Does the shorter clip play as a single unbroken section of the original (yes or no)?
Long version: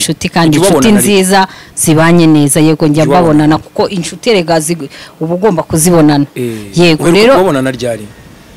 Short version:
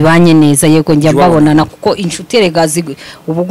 yes